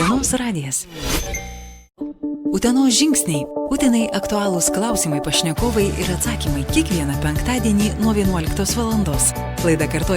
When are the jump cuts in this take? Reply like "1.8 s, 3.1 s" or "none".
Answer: 1.8 s